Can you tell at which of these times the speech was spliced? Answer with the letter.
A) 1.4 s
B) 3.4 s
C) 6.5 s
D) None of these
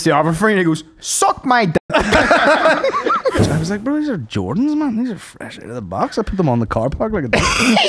B